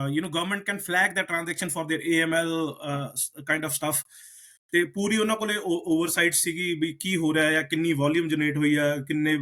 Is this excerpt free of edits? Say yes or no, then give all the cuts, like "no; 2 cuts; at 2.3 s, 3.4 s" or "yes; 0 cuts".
yes; 0 cuts